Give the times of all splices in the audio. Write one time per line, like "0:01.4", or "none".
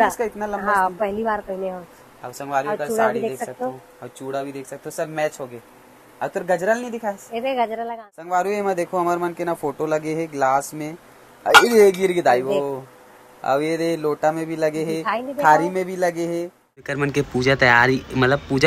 0:07.9
0:16.9